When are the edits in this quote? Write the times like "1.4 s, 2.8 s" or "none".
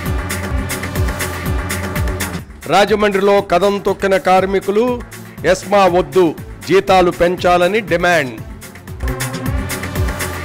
none